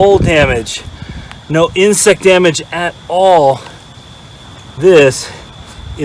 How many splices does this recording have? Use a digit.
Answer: 0